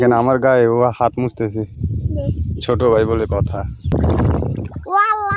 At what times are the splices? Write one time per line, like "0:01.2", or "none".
0:03.9